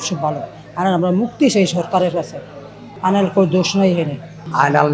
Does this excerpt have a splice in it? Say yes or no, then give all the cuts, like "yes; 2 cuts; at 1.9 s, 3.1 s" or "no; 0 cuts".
no; 0 cuts